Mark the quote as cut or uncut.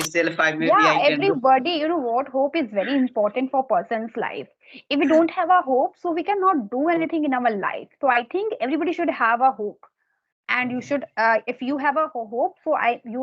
uncut